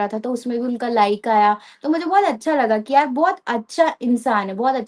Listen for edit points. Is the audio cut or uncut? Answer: uncut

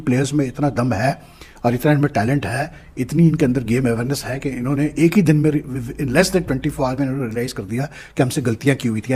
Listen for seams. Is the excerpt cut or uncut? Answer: uncut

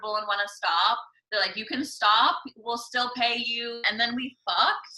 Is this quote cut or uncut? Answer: cut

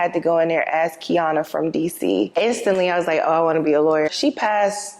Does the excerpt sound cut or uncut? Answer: cut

